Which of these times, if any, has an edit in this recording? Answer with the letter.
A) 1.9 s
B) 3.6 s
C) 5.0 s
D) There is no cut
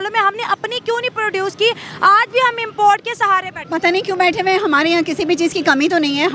B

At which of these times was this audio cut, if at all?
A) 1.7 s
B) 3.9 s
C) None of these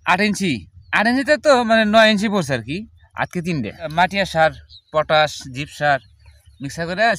B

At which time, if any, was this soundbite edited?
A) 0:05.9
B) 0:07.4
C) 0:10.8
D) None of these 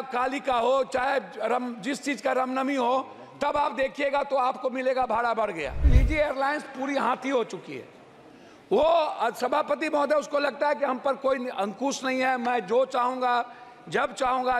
A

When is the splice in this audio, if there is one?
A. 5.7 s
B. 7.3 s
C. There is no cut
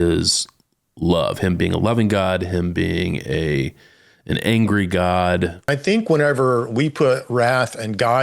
A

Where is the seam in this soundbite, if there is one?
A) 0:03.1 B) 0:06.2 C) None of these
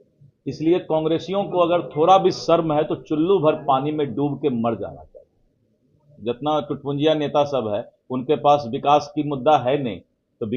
B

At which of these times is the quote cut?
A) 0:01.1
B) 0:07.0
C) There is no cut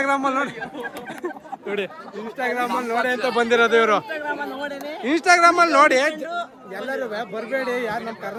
C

